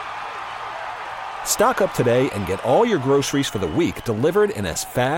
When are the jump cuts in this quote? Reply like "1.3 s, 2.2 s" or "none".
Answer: none